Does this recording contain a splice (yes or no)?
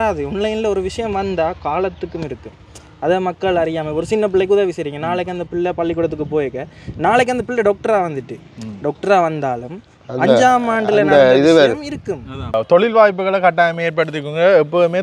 yes